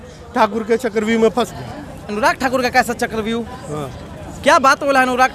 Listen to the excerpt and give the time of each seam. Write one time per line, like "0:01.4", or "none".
none